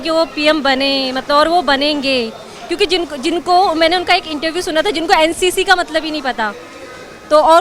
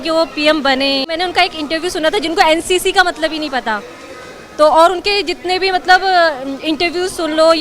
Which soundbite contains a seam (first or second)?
second